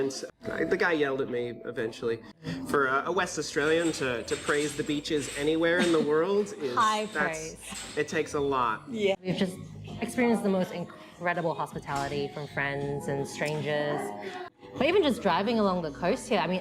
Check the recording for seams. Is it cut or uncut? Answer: cut